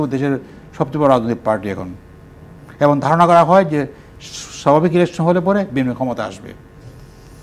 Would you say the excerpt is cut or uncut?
uncut